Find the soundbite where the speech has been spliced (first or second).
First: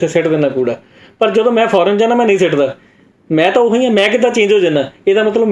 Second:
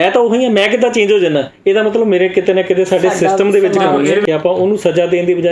second